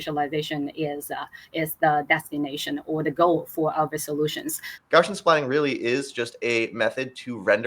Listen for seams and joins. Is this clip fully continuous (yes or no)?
no